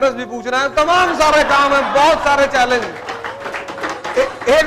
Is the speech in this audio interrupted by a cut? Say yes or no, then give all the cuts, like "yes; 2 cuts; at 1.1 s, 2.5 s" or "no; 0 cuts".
no; 0 cuts